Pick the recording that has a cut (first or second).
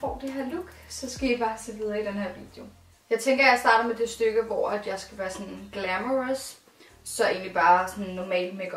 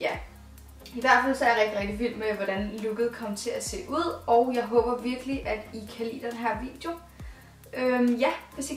second